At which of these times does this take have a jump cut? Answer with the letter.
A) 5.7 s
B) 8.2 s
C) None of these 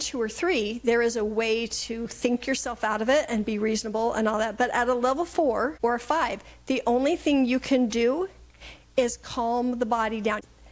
A